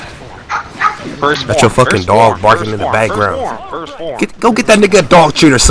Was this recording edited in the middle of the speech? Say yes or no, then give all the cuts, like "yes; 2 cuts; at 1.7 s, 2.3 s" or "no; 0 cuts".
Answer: yes; 1 cut; at 1.6 s